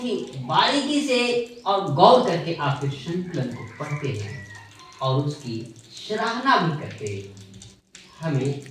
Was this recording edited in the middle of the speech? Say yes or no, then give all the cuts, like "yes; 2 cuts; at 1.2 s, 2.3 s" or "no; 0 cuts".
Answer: no; 0 cuts